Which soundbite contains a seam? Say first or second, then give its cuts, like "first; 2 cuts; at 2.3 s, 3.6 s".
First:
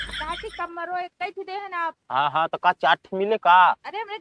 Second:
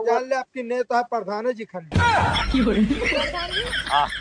second; 2 cuts; at 1.7 s, 3.2 s